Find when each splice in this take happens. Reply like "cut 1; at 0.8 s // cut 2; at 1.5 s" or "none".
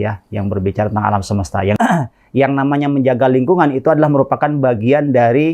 cut 1; at 1.8 s

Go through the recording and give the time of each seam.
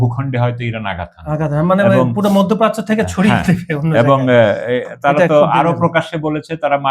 none

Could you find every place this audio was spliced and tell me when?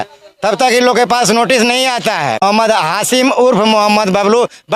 cut 1; at 2.4 s

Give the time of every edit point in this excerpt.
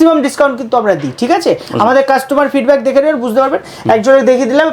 none

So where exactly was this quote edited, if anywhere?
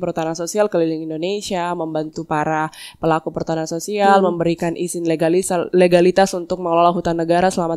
none

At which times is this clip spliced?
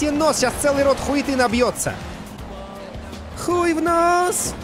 cut 1; at 2.4 s

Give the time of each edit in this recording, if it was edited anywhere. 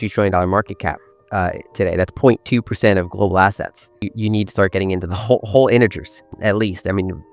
cut 1; at 4.1 s // cut 2; at 6.3 s

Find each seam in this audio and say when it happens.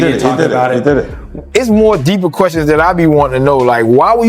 cut 1; at 1.3 s

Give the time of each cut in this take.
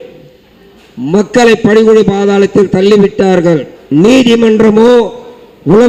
cut 1; at 3.7 s

